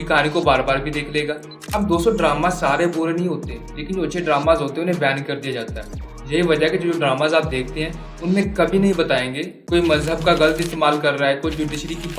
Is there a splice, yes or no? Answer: no